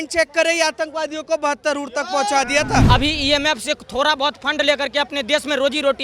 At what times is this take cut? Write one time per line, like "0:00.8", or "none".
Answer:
0:02.8